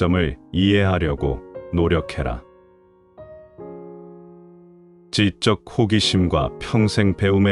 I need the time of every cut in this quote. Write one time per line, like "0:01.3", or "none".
none